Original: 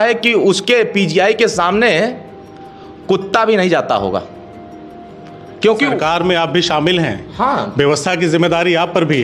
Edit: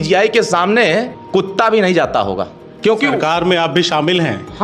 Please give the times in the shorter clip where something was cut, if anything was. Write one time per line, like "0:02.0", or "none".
0:01.2
0:02.6